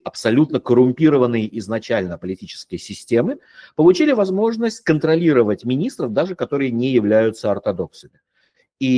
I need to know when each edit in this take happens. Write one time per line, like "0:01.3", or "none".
none